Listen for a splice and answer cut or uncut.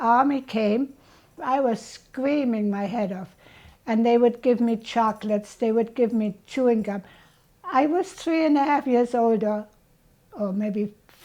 cut